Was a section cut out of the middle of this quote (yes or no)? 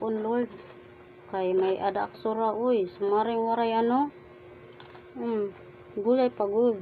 no